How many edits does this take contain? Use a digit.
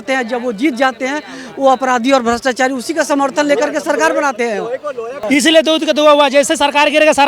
1